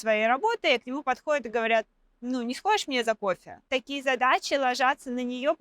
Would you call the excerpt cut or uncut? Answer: cut